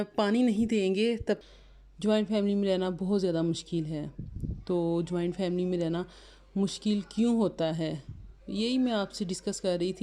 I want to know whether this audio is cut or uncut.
cut